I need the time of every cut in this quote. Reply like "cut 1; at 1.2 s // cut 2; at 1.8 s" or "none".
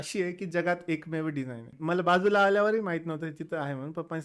cut 1; at 1.6 s